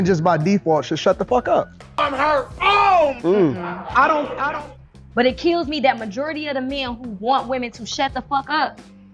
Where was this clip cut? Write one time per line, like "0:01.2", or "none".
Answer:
0:04.7